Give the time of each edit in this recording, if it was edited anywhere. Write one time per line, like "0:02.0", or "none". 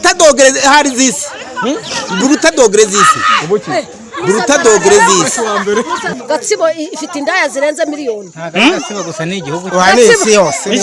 0:06.1